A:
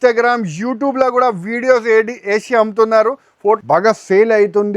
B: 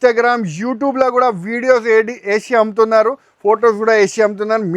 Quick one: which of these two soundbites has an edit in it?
A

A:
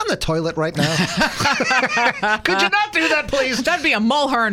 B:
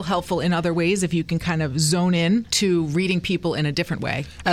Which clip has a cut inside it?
B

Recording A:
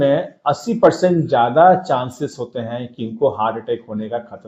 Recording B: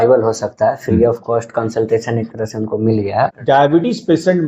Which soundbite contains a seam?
B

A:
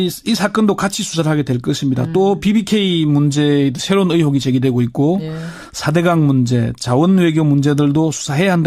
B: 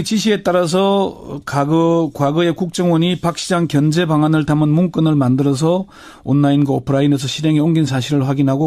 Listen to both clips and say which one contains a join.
B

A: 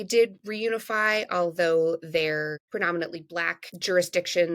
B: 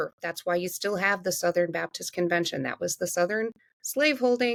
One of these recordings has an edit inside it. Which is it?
A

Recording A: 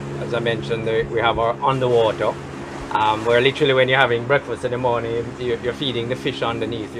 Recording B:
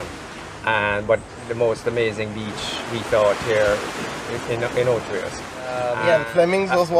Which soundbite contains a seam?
B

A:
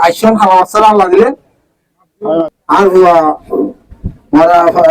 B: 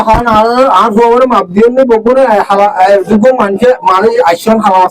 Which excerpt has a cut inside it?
A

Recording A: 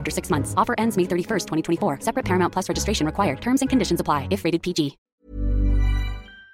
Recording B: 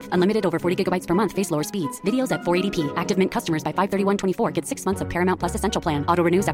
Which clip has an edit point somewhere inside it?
A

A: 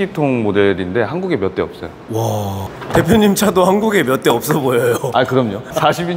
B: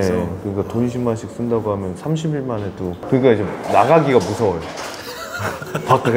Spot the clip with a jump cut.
A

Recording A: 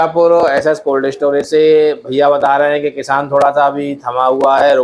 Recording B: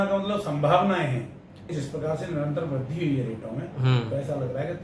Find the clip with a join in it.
B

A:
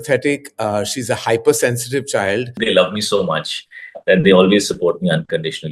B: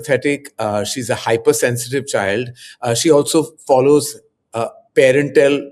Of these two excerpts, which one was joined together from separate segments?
A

